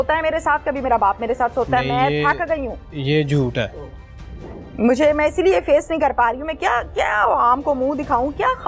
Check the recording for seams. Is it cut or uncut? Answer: uncut